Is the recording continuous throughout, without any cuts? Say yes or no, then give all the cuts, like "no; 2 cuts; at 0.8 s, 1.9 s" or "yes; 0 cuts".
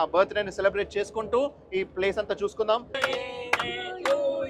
no; 1 cut; at 2.9 s